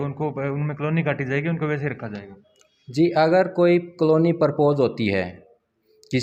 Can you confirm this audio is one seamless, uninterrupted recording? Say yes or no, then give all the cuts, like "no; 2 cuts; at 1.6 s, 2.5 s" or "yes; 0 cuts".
yes; 0 cuts